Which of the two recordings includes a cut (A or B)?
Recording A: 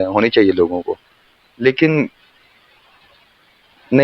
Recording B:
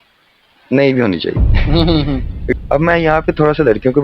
B